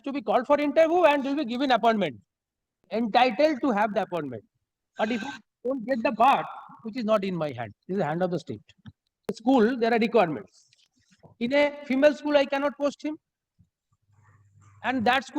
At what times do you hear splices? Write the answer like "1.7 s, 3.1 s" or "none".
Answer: 2.8 s, 9.4 s